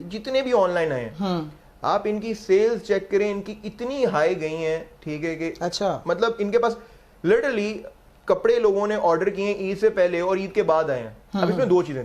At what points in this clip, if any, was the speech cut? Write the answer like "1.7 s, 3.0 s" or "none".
none